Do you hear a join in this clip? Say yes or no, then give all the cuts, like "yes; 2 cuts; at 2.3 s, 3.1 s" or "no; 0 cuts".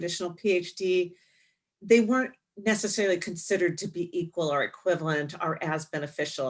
no; 0 cuts